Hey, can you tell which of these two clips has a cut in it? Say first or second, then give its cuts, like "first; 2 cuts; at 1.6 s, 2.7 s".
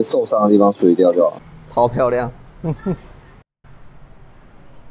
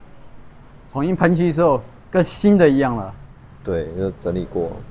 first; 2 cuts; at 1.6 s, 3.6 s